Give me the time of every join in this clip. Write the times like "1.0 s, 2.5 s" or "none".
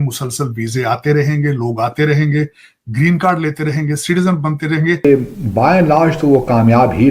5.0 s